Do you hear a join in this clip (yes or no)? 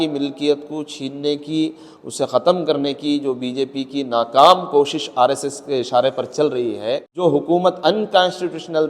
yes